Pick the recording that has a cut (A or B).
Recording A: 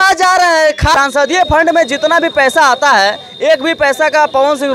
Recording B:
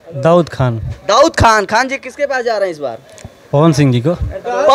A